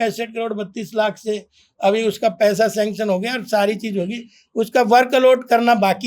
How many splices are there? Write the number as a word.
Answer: zero